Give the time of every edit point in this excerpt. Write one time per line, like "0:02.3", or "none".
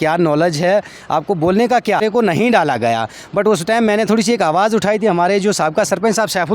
0:02.0